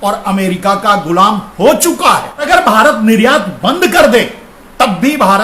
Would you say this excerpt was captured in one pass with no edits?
no; 1 cut; at 2.5 s

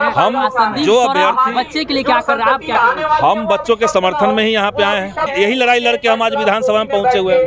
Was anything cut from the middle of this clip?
yes; 1 cut; at 5.3 s

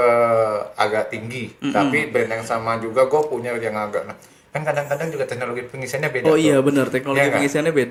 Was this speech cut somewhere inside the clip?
no; 0 cuts

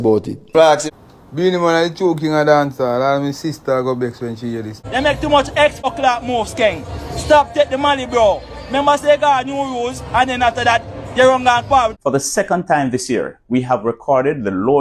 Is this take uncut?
no; 4 cuts; at 0.9 s, 4.8 s, 5.9 s, 12.0 s

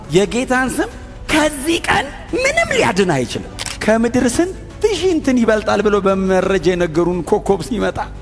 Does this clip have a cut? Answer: yes; 1 cut; at 3.7 s

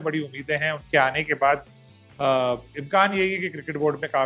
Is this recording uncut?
yes; 0 cuts

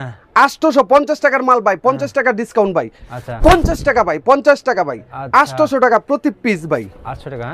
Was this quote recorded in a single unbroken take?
yes; 0 cuts

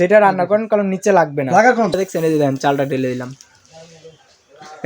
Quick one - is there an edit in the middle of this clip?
yes; 1 cut; at 1.9 s

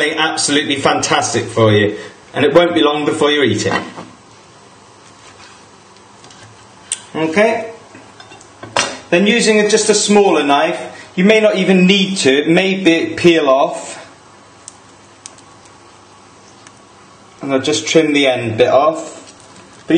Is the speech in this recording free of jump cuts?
yes; 0 cuts

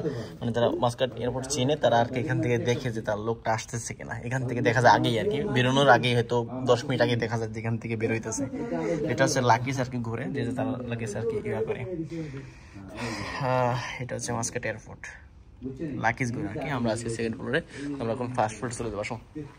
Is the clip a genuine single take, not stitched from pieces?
yes; 0 cuts

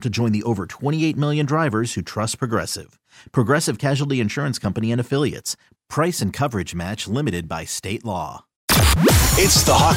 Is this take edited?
yes; 1 cut; at 8.6 s

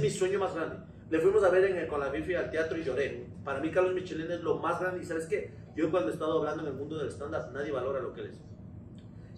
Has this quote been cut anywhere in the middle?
no; 0 cuts

